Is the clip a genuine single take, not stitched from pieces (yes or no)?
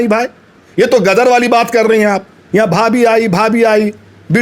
no